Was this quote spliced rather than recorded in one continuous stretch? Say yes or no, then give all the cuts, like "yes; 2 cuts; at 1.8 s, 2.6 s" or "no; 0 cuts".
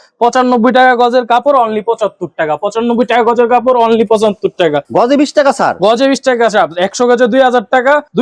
no; 0 cuts